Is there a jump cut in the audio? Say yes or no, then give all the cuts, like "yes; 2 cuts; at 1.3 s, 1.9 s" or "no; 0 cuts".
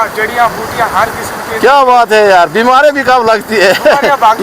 no; 0 cuts